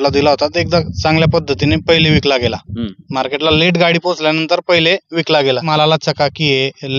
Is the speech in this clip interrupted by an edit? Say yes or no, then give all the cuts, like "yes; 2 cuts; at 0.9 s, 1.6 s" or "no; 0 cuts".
yes; 1 cut; at 5.7 s